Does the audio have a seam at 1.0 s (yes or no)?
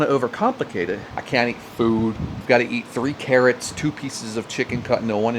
yes